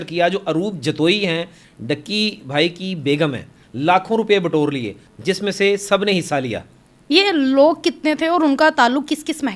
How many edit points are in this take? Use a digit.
2